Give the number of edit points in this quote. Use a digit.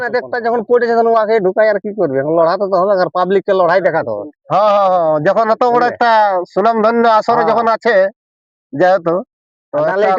0